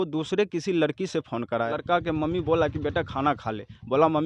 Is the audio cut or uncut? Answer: cut